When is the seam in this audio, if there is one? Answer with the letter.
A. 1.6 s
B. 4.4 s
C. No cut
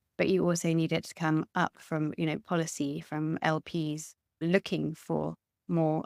B